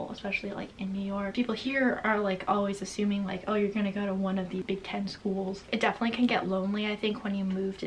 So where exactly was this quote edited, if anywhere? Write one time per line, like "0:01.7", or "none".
0:01.3
0:04.6
0:05.7

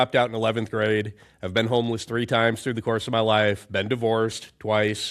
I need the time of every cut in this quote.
none

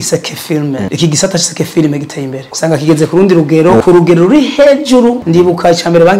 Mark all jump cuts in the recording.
0:00.9
0:02.5
0:03.8
0:05.2

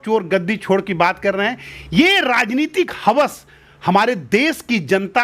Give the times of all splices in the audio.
none

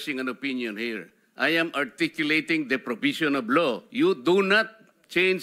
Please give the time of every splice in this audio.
none

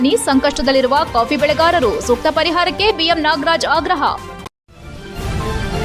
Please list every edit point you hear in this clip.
0:04.5

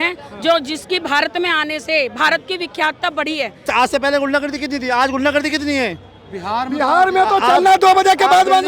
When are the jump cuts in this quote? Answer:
0:03.6

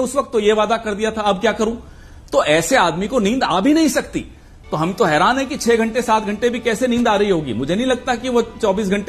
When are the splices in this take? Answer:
0:01.2

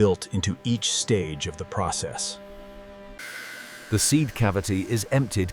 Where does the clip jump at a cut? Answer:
0:03.2

